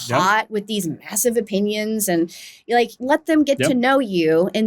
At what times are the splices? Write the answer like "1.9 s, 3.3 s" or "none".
3.0 s